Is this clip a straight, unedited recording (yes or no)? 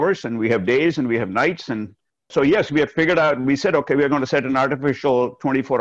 yes